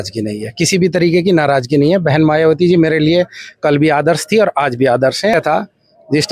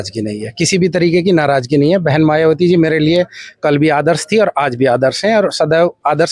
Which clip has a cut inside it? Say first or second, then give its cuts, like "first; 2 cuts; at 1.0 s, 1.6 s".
first; 1 cut; at 5.3 s